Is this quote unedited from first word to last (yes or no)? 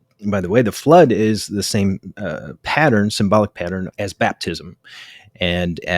no